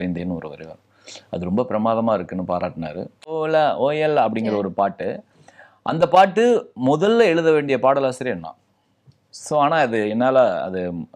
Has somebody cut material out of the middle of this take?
yes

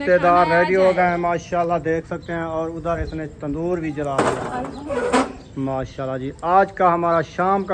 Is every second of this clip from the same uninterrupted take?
no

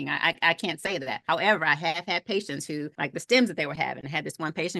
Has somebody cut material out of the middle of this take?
yes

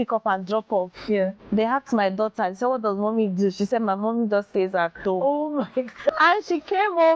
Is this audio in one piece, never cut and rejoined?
no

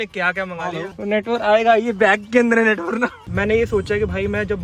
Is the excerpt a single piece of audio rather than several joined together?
no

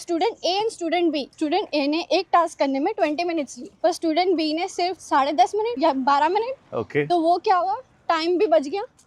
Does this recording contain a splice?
no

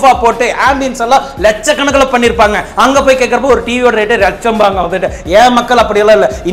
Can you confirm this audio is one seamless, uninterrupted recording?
yes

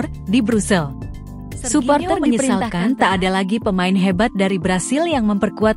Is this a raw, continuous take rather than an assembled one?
no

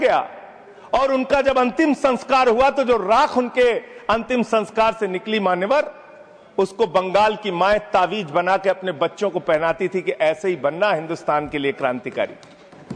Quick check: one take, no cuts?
yes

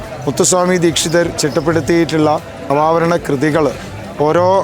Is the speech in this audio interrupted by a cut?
yes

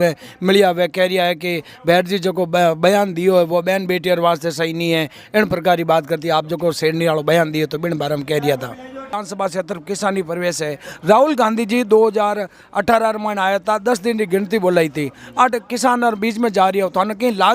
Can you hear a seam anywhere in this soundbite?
yes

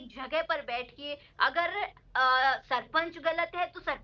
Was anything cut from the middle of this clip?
no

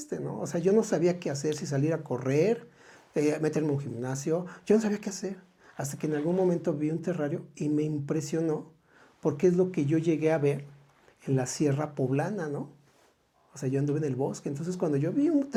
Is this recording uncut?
yes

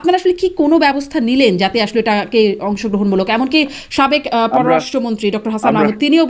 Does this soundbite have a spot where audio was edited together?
no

